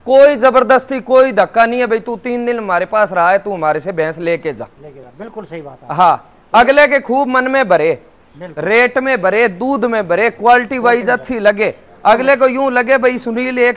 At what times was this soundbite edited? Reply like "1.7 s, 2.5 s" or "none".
none